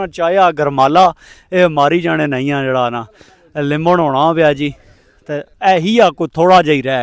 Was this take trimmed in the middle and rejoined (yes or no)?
no